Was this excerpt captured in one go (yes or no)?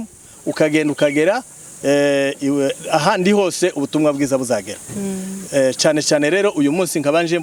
yes